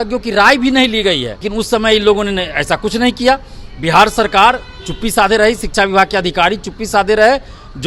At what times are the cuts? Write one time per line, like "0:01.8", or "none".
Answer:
0:01.4

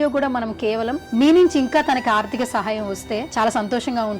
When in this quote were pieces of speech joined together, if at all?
0:01.0
0:03.3

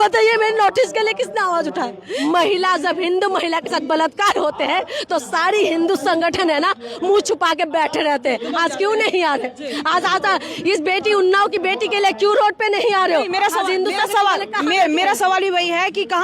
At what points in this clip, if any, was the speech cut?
0:02.1

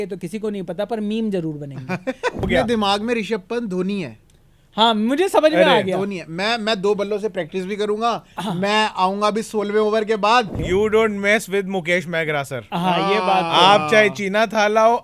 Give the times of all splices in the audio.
0:02.4
0:10.6

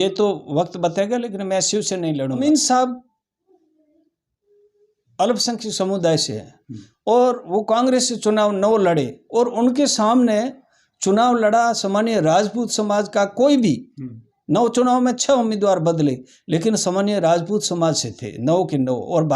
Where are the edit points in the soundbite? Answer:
0:02.4

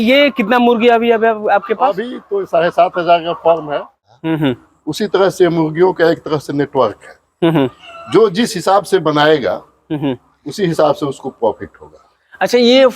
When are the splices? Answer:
0:03.9

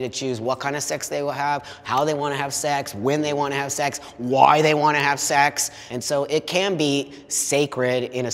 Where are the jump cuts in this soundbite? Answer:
none

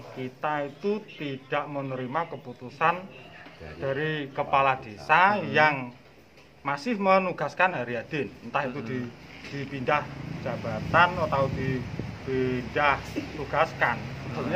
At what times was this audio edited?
none

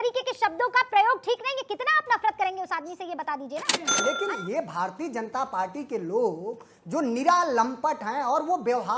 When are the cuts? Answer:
0:03.8

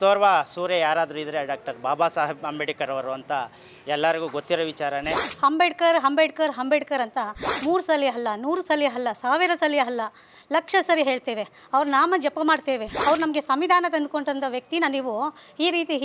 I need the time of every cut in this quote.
0:05.3
0:12.9

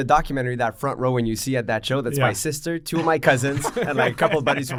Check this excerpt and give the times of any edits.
none

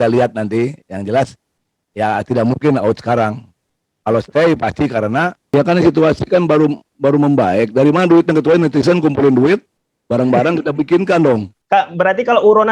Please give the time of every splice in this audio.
0:05.4
0:11.5

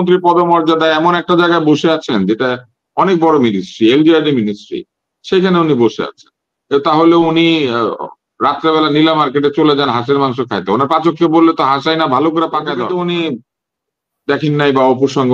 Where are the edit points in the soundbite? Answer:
0:12.8

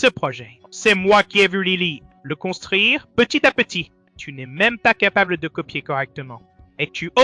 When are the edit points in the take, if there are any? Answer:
none

